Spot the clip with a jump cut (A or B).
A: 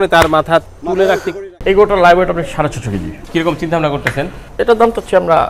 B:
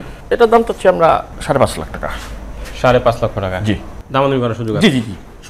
A